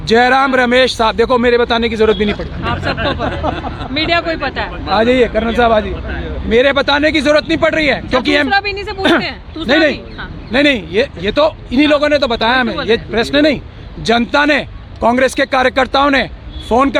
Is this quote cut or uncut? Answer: uncut